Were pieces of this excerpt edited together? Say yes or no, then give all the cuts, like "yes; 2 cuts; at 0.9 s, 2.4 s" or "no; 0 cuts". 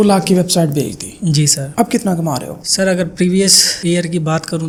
no; 0 cuts